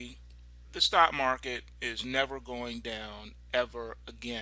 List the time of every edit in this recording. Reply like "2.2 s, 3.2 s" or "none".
2.2 s